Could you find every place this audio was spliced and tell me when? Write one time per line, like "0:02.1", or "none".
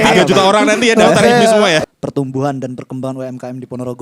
0:01.8